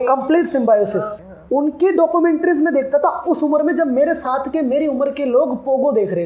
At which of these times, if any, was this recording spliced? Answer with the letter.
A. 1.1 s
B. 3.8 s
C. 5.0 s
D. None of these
A